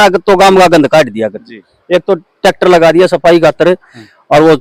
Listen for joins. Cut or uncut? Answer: uncut